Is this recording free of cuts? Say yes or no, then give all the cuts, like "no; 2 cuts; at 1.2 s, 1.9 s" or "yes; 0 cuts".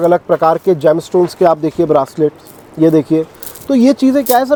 yes; 0 cuts